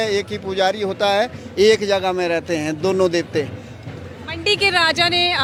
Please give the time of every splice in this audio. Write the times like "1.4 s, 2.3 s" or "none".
none